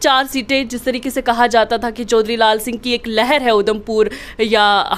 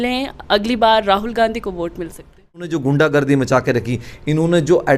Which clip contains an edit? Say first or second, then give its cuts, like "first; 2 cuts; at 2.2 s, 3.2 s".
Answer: second; 1 cut; at 2.7 s